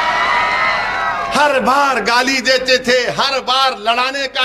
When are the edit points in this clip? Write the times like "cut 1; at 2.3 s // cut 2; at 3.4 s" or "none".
cut 1; at 1.3 s